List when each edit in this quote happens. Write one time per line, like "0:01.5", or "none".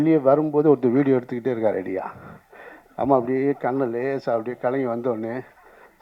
none

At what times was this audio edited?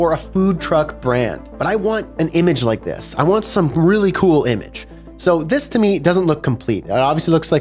0:01.5

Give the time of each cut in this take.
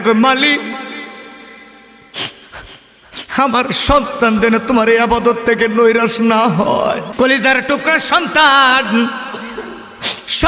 0:07.1

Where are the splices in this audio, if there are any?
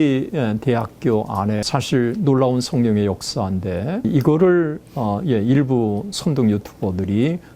0:01.6
0:04.0

